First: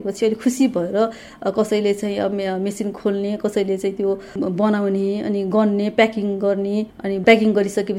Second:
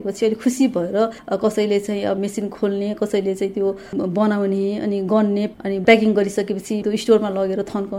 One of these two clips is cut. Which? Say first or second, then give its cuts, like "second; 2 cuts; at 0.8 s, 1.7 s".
second; 4 cuts; at 1.2 s, 2.2 s, 5.5 s, 6.8 s